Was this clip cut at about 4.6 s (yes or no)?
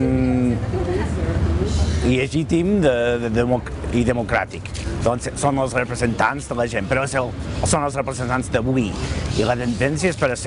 yes